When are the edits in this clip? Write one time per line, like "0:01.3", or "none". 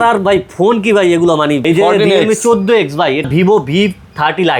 0:01.6
0:03.2